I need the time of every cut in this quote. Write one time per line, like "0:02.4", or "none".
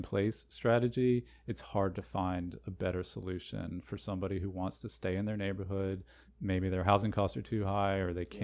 0:05.8